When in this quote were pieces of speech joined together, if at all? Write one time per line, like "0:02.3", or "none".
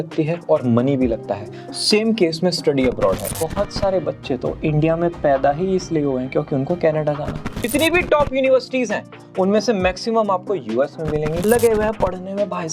0:03.3
0:07.6
0:11.4